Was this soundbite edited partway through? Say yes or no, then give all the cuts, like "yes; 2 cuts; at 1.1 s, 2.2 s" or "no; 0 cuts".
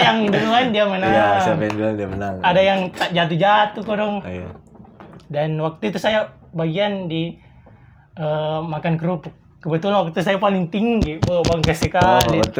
no; 0 cuts